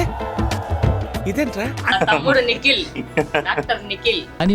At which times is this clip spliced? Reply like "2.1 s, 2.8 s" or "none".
1.8 s